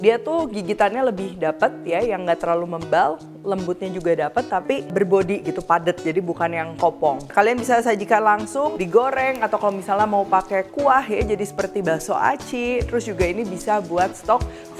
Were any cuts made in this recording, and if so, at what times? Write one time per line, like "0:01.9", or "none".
0:04.9
0:07.2
0:08.7